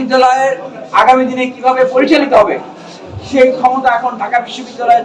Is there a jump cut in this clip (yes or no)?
no